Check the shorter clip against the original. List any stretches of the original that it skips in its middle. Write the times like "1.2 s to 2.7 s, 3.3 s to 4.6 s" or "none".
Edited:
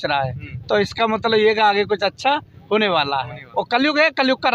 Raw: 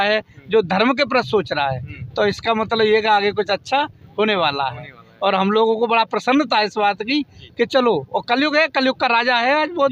5.0 s to 8.1 s